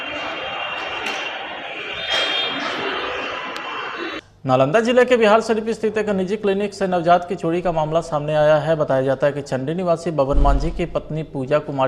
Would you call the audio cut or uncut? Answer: cut